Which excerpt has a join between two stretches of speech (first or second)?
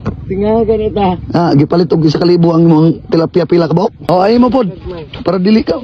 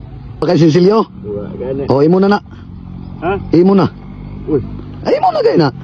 first